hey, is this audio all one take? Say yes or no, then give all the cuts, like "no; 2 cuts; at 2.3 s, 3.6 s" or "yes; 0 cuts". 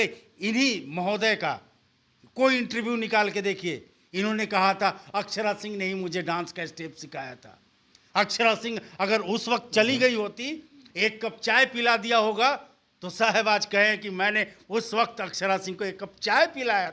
yes; 0 cuts